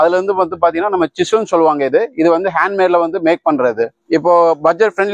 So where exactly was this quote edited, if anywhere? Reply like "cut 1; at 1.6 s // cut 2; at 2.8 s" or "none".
cut 1; at 4.0 s

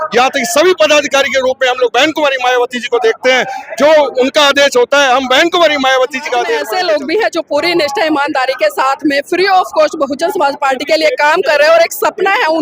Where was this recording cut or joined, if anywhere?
cut 1; at 6.7 s

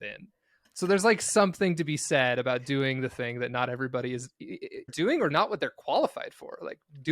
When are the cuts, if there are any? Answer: cut 1; at 4.9 s

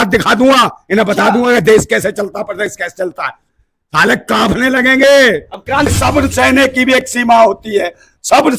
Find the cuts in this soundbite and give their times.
cut 1; at 5.9 s

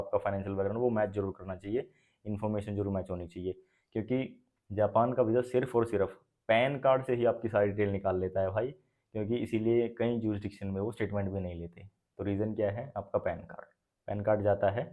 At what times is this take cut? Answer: none

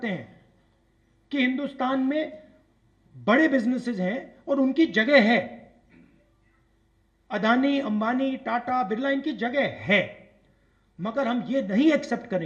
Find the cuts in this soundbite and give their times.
none

